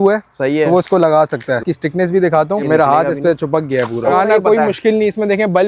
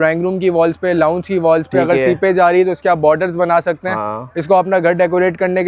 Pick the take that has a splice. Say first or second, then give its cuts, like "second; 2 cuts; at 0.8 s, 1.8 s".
first; 3 cuts; at 1.6 s, 2.6 s, 4.1 s